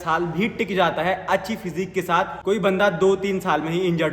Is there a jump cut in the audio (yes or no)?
yes